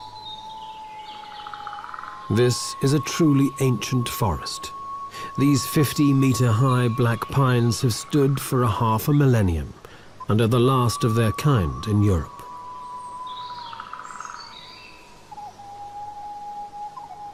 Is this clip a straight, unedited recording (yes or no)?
yes